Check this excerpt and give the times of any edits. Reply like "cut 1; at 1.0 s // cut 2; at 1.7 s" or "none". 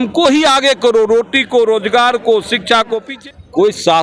cut 1; at 3.0 s